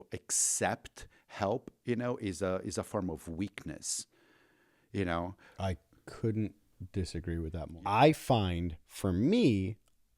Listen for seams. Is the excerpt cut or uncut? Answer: cut